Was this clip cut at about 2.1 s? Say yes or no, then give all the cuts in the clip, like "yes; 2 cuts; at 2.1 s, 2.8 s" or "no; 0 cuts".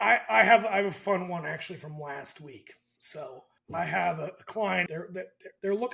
no; 2 cuts; at 3.5 s, 4.9 s